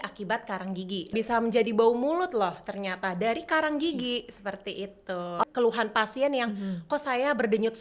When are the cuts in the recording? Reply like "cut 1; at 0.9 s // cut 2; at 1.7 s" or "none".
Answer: cut 1; at 1.1 s // cut 2; at 5.4 s

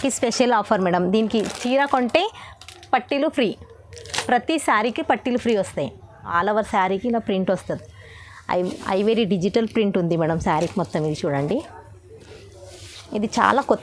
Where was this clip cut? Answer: cut 1; at 6.4 s

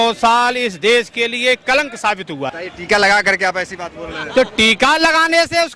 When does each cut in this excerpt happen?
cut 1; at 2.5 s

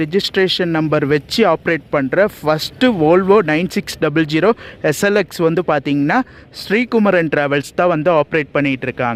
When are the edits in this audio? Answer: none

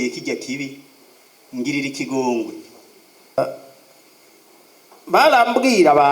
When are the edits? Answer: cut 1; at 3.4 s

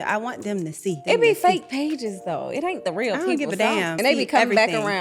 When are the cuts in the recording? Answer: cut 1; at 1.0 s // cut 2; at 4.0 s

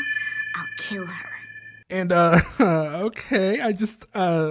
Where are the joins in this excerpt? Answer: none

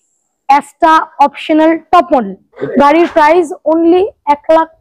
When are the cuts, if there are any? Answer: cut 1; at 2.5 s

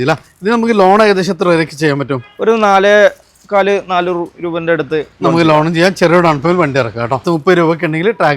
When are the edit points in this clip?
cut 1; at 7.2 s

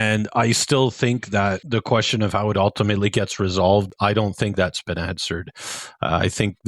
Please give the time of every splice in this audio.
cut 1; at 3.9 s

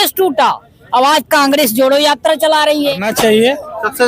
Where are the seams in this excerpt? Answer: cut 1; at 3.1 s

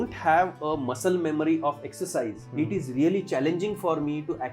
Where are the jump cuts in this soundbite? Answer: cut 1; at 2.4 s

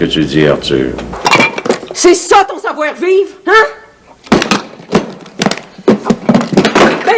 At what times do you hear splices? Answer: cut 1; at 1.1 s

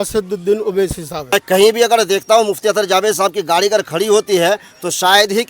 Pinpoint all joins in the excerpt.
cut 1; at 1.3 s

